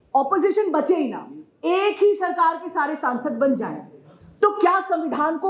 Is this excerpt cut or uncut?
uncut